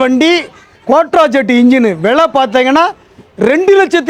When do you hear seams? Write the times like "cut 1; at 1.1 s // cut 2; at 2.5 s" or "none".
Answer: none